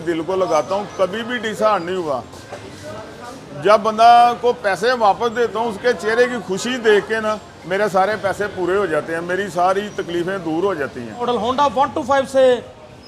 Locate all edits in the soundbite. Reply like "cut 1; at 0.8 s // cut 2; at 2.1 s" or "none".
cut 1; at 11.2 s